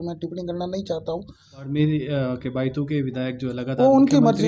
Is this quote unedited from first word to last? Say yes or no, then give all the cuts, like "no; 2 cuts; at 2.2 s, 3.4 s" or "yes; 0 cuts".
no; 1 cut; at 1.7 s